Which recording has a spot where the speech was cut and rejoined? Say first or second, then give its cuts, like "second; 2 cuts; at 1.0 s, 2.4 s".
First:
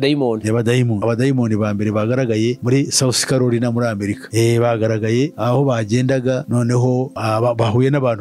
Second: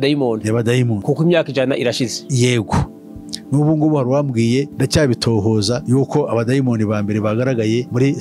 first; 1 cut; at 1.0 s